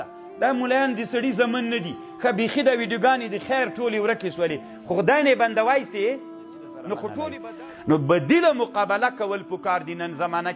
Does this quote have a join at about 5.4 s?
no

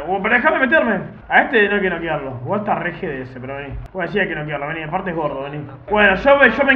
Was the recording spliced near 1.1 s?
yes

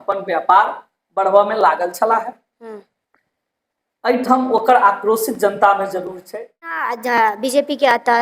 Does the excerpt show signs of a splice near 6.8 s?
yes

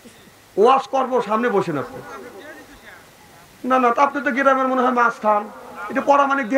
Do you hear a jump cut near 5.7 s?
no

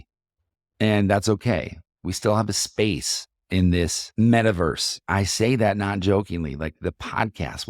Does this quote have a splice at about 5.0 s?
yes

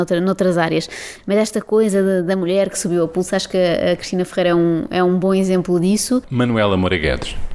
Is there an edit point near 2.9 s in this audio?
no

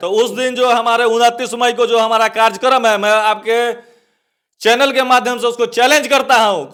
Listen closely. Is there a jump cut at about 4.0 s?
no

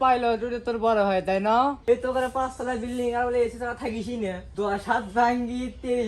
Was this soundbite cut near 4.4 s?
yes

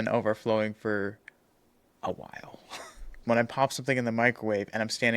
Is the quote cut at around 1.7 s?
no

